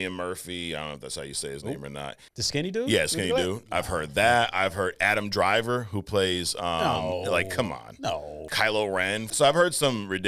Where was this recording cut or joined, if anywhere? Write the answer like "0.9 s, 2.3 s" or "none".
2.2 s, 8.4 s, 9.3 s

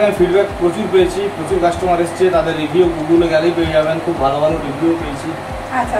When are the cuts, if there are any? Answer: none

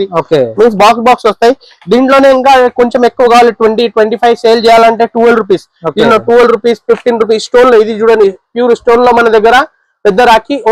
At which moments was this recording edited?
none

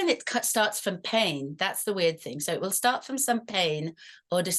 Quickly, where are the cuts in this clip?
none

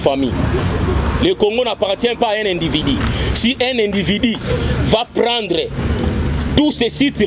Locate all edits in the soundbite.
none

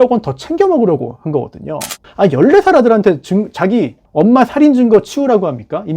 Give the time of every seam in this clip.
2.0 s, 4.0 s

